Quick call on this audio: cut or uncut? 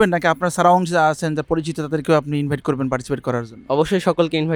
uncut